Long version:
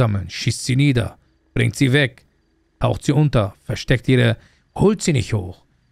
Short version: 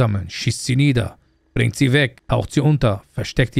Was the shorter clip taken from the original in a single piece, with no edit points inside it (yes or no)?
no